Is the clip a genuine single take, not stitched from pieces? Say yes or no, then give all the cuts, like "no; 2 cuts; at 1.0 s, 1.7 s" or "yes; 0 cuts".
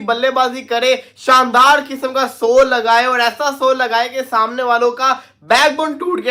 yes; 0 cuts